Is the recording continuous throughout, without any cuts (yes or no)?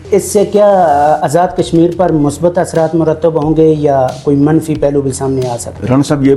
yes